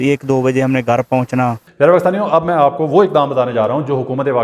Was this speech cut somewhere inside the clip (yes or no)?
yes